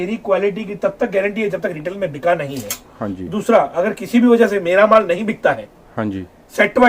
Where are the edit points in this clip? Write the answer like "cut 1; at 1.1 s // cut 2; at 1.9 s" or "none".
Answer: none

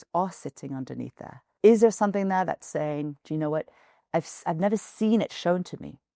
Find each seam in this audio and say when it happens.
cut 1; at 1.5 s // cut 2; at 3.2 s

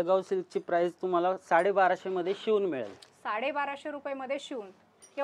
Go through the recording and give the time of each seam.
none

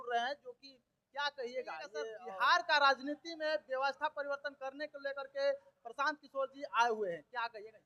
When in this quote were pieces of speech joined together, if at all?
cut 1; at 2.1 s

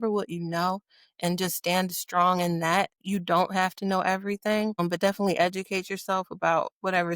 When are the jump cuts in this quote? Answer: cut 1; at 3.0 s

